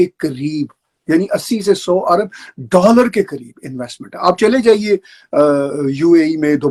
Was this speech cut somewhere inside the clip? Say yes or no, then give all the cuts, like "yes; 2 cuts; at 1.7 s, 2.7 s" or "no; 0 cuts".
no; 0 cuts